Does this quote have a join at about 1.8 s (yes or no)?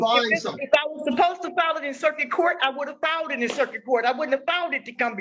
no